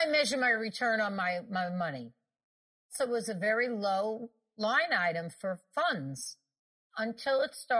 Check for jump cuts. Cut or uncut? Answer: cut